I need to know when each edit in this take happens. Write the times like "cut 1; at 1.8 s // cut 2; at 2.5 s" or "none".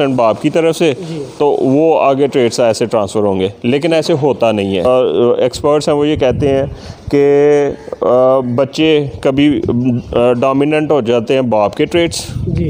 cut 1; at 4.9 s